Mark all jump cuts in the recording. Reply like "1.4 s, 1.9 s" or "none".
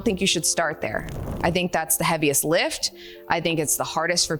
none